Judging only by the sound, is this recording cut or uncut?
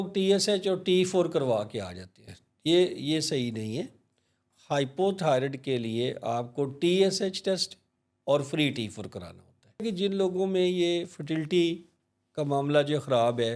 cut